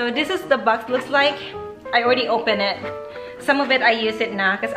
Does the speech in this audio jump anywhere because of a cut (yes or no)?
no